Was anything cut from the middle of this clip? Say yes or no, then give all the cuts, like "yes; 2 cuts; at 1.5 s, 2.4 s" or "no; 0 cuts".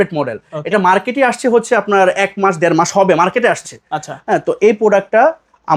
no; 0 cuts